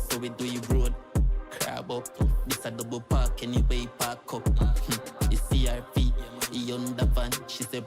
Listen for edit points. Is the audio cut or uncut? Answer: cut